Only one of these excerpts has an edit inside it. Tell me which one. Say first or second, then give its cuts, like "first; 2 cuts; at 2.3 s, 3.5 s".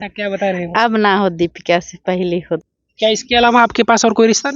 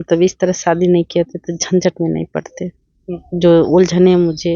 first; 1 cut; at 2.6 s